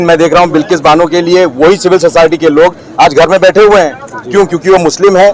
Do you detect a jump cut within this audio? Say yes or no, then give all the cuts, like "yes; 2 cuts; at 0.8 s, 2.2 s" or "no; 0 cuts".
no; 0 cuts